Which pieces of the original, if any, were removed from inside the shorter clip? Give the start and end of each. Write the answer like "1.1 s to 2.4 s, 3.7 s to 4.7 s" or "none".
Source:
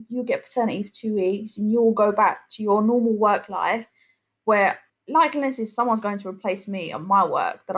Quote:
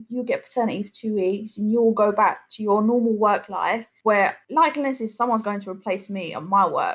4.3 s to 4.9 s